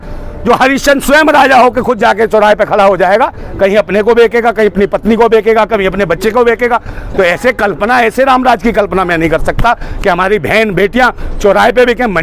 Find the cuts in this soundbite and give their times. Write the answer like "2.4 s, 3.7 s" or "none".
none